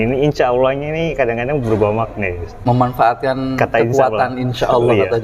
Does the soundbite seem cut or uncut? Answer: uncut